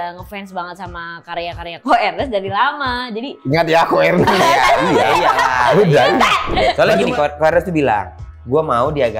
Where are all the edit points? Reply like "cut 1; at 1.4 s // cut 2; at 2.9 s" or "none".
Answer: cut 1; at 6.7 s